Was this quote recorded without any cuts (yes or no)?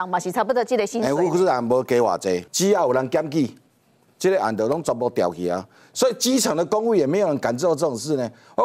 no